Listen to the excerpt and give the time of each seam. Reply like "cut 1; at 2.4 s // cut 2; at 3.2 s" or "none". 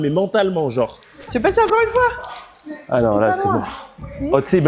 cut 1; at 1.1 s